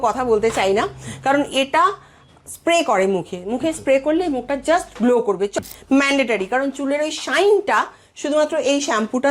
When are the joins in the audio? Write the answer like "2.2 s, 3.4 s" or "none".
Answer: 5.5 s